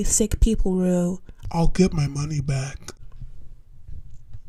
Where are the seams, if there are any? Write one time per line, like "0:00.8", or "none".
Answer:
none

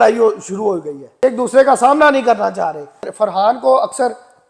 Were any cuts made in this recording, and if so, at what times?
0:01.0
0:03.0

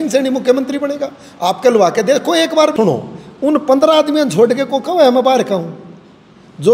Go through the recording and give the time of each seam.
0:02.7

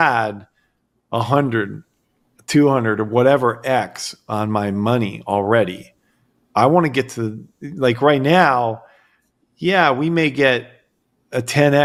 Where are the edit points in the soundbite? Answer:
none

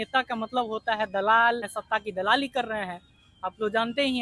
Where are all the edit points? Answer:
0:01.7

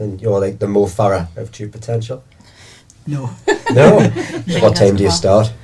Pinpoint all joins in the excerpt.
0:04.3

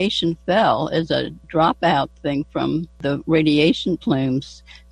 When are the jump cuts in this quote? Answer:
0:01.4
0:03.0

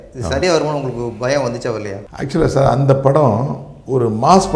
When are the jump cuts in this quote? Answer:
0:02.0

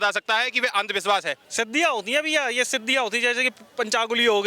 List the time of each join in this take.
0:01.4

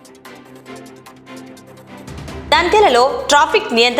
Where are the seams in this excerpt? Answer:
0:02.2

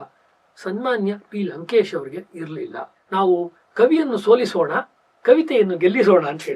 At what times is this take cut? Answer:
0:03.0

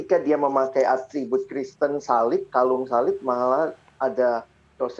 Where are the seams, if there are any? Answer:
none

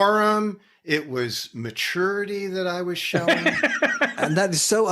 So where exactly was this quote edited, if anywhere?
0:04.0

